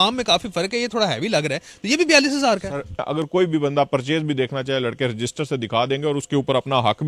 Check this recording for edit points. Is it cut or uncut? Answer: cut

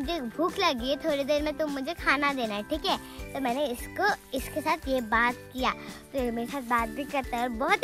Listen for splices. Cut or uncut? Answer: uncut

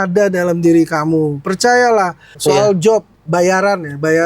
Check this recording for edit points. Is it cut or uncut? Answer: cut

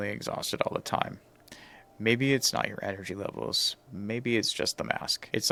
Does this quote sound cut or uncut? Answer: uncut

